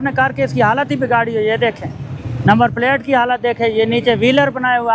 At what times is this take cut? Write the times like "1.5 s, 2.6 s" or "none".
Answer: none